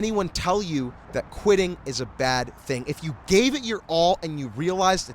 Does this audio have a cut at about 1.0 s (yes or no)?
yes